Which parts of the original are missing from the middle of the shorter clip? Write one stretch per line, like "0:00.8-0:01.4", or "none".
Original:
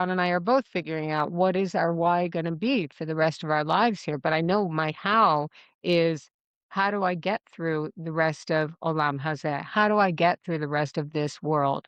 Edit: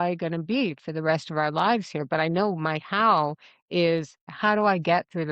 0:06.4-0:09.6